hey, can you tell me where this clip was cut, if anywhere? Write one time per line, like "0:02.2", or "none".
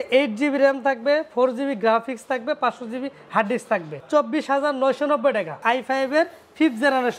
0:03.9
0:05.6

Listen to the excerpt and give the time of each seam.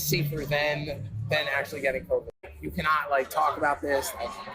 0:02.4

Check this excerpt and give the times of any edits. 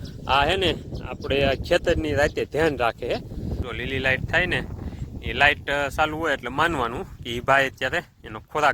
0:03.6

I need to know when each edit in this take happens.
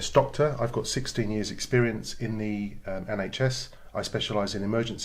0:03.7

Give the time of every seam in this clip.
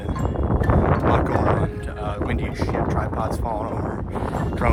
none

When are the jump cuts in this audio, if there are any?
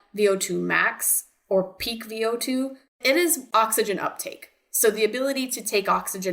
0:03.0

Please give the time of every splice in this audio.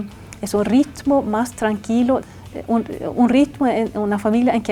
0:02.2

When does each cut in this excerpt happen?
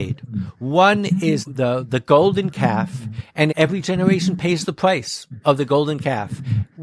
0:01.5
0:03.5

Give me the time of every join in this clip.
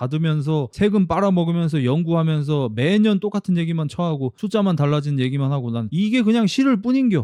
none

